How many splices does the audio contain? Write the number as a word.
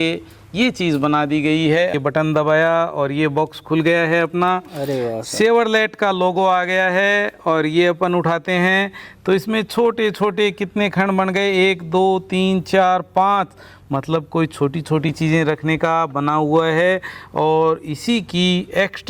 one